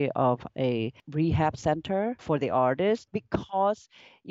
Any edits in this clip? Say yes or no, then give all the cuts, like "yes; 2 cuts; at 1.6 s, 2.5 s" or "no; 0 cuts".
yes; 3 cuts; at 1.0 s, 2.2 s, 3.1 s